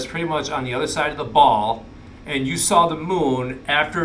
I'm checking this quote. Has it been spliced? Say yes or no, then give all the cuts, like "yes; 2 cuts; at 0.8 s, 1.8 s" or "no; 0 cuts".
no; 0 cuts